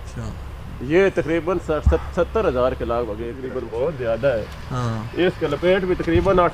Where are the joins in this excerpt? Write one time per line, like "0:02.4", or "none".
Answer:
0:03.6